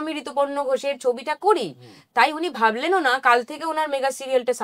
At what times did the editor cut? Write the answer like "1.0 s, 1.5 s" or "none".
none